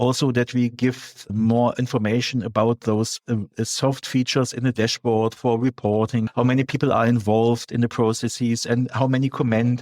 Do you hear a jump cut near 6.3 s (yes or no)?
yes